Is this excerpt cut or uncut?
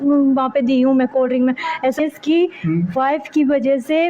cut